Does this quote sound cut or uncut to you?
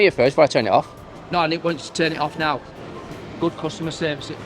cut